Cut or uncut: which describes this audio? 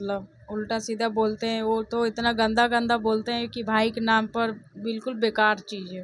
uncut